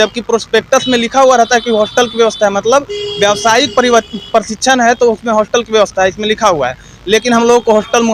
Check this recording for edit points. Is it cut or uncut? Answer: uncut